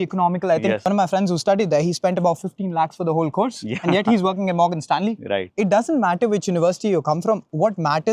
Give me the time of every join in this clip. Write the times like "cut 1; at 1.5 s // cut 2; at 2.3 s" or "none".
none